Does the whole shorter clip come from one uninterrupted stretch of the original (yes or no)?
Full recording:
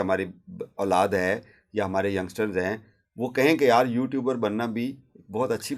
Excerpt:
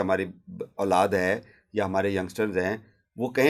yes